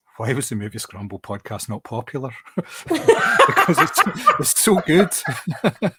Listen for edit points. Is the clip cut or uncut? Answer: uncut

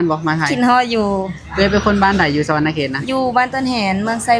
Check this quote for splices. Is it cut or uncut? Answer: uncut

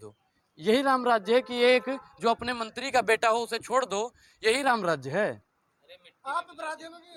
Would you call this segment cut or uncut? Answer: uncut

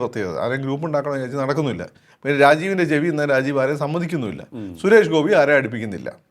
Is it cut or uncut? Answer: uncut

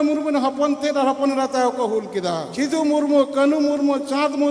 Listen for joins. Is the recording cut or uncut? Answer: cut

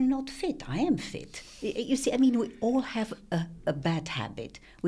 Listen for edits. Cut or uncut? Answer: uncut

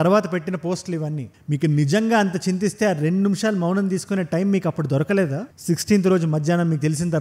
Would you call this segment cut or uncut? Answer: uncut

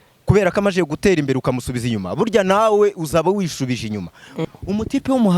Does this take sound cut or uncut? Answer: cut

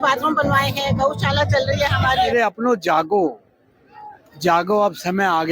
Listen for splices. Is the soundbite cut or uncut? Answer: cut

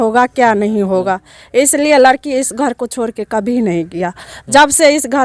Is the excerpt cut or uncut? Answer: uncut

